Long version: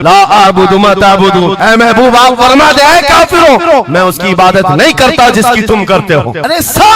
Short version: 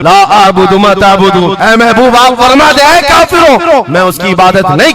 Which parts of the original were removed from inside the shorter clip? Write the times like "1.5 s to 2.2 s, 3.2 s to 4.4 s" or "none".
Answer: none